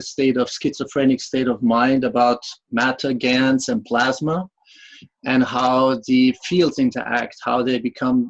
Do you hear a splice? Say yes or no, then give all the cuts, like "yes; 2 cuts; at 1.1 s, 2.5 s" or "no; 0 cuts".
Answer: yes; 1 cut; at 6.4 s